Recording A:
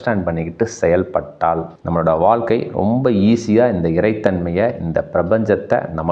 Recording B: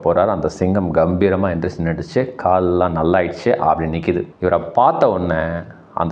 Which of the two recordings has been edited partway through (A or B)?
B